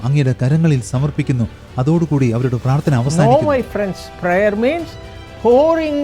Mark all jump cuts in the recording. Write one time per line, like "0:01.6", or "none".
0:03.1

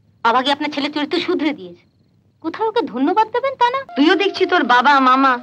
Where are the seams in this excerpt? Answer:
0:03.8

